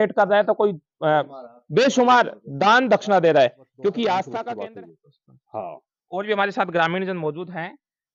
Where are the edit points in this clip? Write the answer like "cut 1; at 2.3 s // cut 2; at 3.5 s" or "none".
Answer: cut 1; at 4.5 s